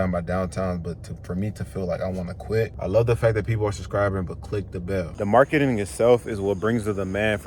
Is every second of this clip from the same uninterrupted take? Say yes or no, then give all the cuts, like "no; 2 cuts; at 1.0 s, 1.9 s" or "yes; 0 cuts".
no; 2 cuts; at 2.7 s, 5.2 s